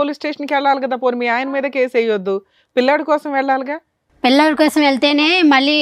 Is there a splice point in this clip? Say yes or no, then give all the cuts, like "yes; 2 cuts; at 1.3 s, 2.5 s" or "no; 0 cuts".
no; 0 cuts